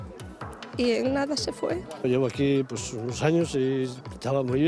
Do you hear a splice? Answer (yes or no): yes